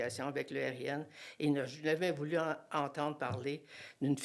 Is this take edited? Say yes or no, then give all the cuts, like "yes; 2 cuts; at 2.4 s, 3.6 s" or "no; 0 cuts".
no; 0 cuts